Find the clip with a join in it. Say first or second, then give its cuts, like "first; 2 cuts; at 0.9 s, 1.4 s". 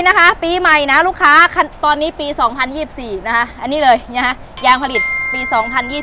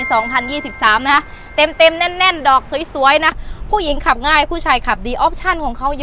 second; 1 cut; at 3.4 s